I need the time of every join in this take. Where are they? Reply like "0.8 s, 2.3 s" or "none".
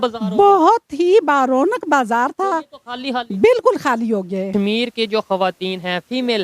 4.5 s